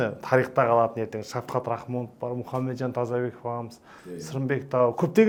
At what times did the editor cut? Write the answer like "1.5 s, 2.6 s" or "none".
none